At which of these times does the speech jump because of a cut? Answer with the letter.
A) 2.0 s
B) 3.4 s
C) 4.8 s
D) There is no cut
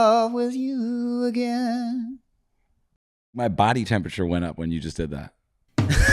B